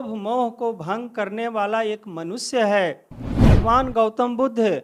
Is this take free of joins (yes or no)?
no